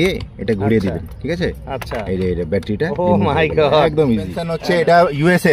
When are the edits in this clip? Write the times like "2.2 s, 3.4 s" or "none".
4.4 s

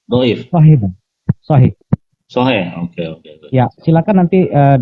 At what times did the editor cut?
1.8 s, 3.8 s

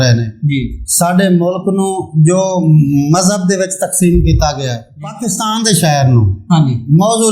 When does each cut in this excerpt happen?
4.9 s

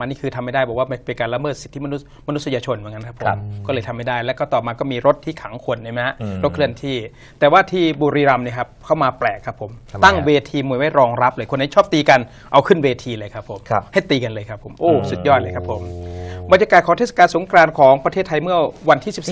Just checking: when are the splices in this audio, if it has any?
14.8 s

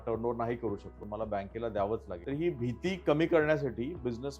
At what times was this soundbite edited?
1.0 s, 2.1 s

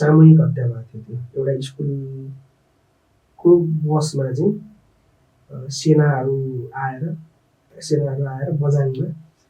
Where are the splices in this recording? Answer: 7.7 s

